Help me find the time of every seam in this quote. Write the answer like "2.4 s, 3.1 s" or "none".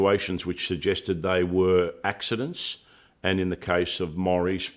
none